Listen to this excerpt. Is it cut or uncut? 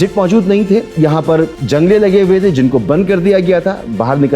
cut